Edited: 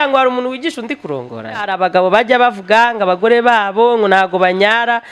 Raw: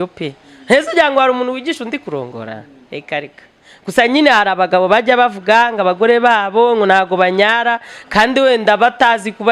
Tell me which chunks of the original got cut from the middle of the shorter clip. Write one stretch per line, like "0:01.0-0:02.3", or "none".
0:02.7-0:04.5